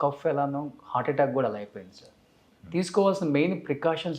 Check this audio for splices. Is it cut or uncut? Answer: uncut